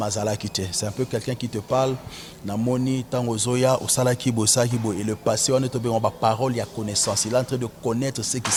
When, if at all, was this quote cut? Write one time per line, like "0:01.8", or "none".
none